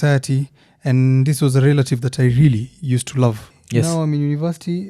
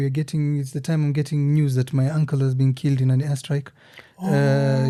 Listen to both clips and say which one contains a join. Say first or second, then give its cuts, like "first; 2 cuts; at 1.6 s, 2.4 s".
first; 1 cut; at 3.5 s